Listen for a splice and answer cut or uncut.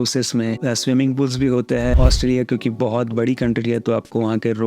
cut